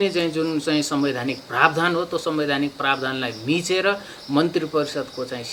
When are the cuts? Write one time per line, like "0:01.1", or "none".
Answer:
none